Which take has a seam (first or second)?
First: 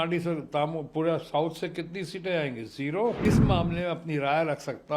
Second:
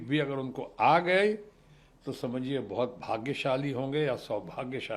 first